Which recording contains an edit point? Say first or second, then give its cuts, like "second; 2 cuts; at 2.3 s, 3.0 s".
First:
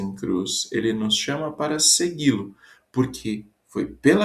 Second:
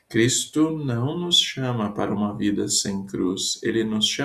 first; 1 cut; at 2.3 s